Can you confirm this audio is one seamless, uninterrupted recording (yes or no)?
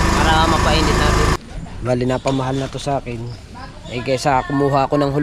no